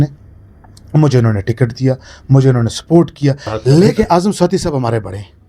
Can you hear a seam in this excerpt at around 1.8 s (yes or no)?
no